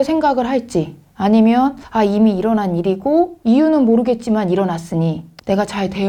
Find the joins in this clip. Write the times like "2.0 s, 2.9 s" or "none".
none